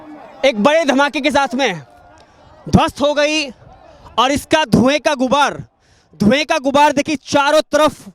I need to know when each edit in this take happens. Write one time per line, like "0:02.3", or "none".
none